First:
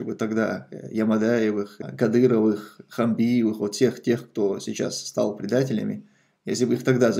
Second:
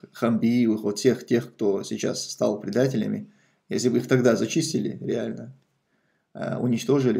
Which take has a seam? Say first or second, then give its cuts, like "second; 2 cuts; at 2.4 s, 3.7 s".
first; 1 cut; at 1.8 s